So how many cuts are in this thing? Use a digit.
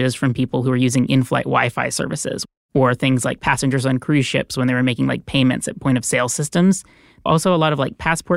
2